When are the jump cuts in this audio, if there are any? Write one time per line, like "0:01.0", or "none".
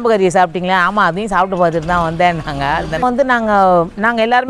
0:03.0

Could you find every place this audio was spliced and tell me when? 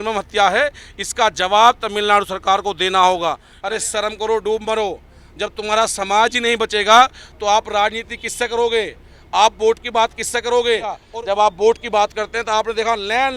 0:03.5
0:11.1

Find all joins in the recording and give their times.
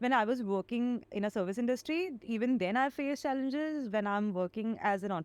0:01.1

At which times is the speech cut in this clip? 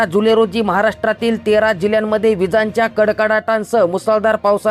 none

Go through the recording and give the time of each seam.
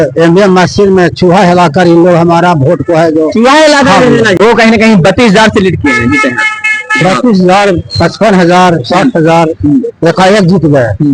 0:04.3

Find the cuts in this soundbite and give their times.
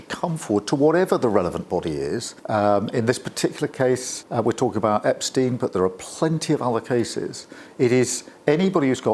0:02.3
0:04.2

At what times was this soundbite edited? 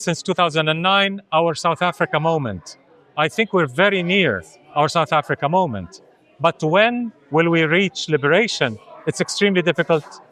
none

